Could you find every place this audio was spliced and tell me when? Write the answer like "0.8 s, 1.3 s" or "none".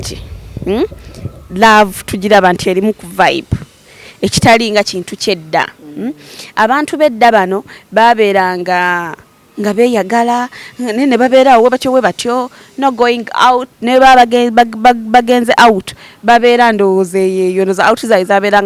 none